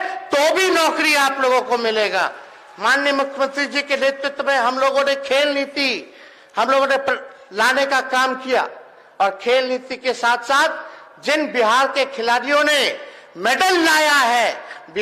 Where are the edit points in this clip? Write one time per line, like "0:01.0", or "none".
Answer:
none